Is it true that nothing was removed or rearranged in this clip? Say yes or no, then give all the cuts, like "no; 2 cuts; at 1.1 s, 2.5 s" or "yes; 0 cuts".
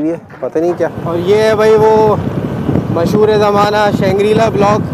no; 1 cut; at 1.0 s